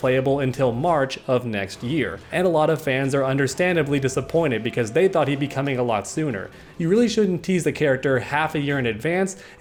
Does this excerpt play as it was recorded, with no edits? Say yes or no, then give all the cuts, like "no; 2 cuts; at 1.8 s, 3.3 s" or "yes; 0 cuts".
yes; 0 cuts